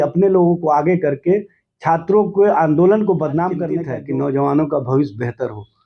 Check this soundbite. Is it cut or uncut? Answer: cut